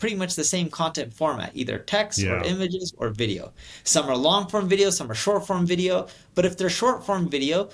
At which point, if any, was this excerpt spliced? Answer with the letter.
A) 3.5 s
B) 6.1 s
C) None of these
C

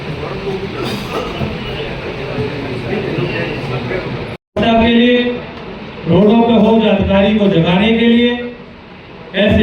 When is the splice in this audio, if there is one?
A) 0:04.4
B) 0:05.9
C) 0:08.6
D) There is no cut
A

